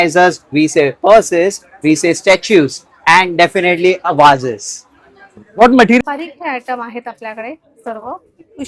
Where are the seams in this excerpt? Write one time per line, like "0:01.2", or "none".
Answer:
0:06.0